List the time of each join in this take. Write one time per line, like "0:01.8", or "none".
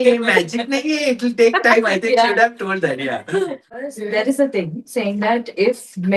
0:04.0